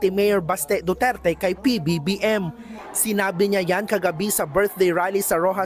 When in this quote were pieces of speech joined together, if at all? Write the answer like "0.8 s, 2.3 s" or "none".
2.5 s